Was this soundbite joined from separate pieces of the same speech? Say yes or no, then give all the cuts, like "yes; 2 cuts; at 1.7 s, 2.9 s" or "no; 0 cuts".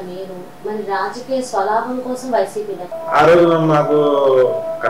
yes; 1 cut; at 2.9 s